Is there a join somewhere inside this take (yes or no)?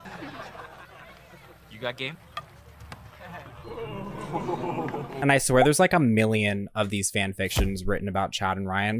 yes